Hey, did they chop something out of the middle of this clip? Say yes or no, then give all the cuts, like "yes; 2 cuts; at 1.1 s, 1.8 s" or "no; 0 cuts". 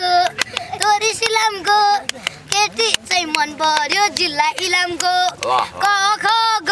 no; 0 cuts